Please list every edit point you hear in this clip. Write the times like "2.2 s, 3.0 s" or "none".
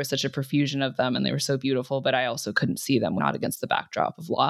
3.2 s

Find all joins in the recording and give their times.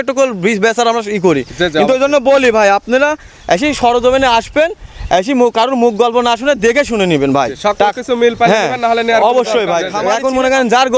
10.0 s

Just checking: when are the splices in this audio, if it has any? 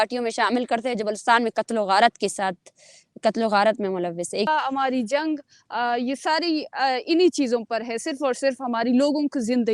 4.5 s

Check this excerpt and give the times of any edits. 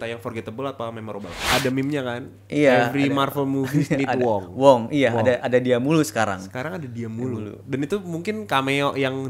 1.4 s

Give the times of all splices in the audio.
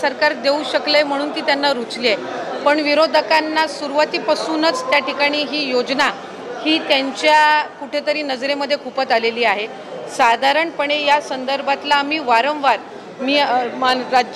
none

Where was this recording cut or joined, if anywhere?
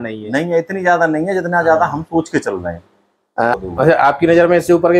3.6 s

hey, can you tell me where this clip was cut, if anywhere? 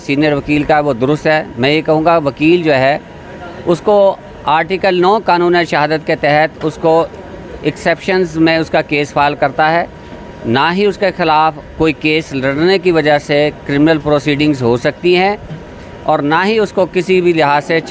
none

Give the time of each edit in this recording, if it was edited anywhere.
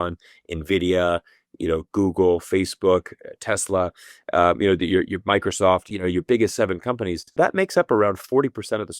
5.8 s, 7.4 s

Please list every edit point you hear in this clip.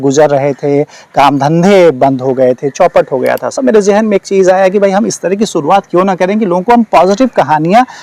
3.5 s

